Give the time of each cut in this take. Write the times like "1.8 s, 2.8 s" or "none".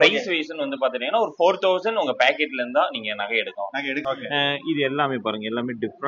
4.0 s

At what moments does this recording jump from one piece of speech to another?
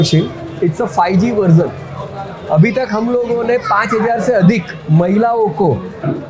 none

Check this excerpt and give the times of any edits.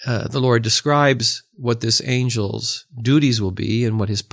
none

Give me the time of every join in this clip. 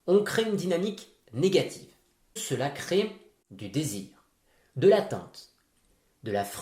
2.4 s

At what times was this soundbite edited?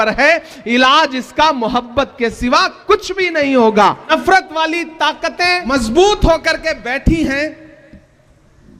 4.1 s, 5.6 s

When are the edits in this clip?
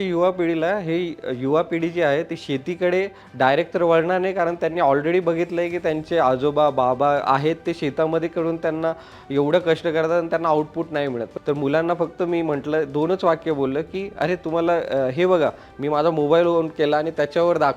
11.3 s

